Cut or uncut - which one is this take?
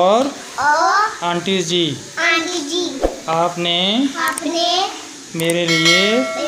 uncut